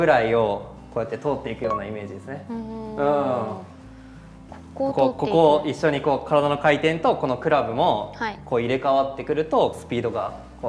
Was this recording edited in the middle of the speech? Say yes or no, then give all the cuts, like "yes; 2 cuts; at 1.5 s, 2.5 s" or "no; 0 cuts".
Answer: yes; 1 cut; at 9.8 s